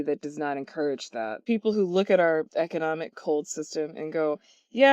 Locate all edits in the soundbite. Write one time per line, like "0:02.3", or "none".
0:01.4